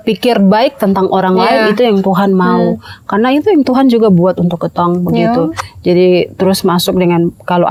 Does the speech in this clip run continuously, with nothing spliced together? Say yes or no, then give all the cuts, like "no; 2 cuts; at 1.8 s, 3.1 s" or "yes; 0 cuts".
yes; 0 cuts